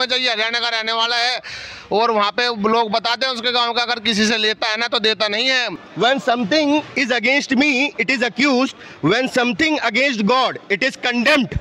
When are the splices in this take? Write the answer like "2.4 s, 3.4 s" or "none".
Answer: 5.8 s